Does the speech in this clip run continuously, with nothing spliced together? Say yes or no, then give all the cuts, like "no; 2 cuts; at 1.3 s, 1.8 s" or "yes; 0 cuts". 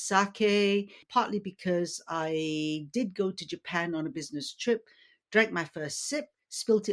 no; 1 cut; at 1.0 s